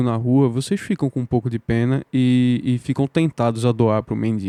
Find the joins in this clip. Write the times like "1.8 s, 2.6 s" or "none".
none